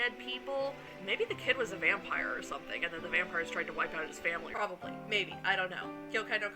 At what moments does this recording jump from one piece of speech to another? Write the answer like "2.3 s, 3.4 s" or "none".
0.9 s, 4.5 s